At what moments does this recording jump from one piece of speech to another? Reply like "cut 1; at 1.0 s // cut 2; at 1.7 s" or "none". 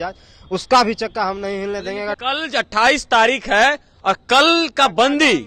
cut 1; at 2.2 s